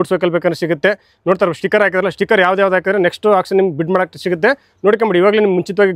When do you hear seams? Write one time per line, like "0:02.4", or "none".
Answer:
none